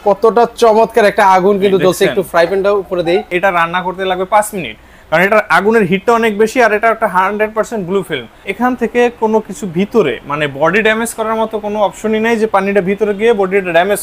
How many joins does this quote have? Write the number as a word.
two